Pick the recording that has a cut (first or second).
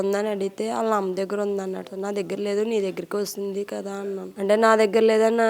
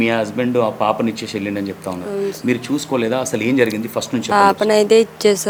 first